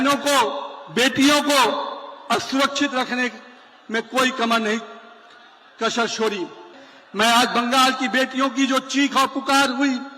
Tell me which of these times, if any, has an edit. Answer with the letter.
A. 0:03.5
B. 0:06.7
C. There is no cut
B